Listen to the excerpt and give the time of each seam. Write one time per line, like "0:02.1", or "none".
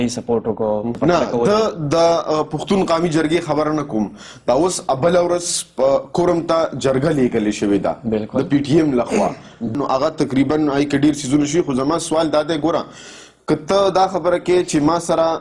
0:00.9
0:09.7